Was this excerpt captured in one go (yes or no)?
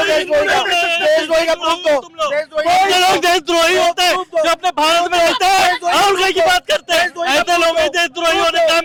yes